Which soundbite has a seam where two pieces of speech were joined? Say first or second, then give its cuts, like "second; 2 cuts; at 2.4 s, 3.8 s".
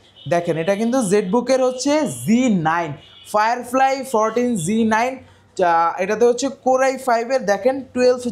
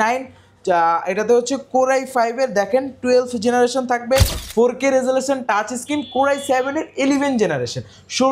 second; 1 cut; at 4.4 s